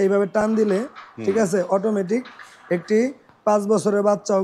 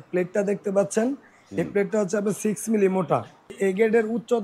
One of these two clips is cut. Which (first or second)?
second